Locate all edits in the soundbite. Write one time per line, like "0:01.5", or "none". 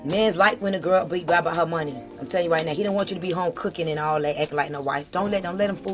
none